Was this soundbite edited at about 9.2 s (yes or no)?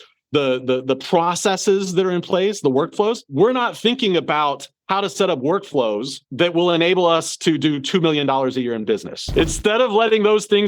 yes